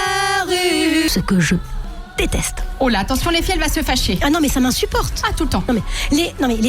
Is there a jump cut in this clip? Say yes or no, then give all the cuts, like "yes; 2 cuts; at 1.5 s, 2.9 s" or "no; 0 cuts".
yes; 1 cut; at 1.1 s